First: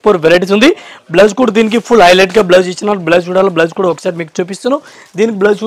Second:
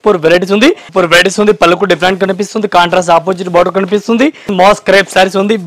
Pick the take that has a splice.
second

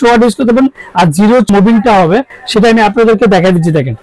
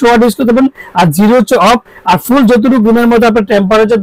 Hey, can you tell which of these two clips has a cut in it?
first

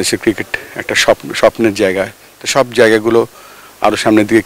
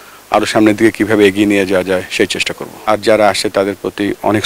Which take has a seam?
second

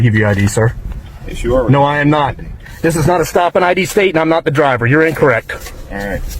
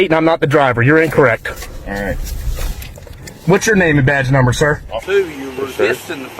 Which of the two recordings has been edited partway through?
second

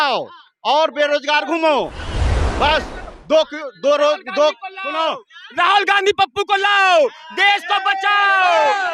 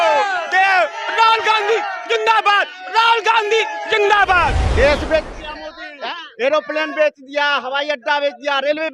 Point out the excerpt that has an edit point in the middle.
second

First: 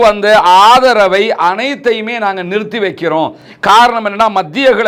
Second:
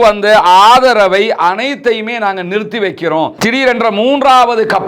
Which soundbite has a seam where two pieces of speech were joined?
second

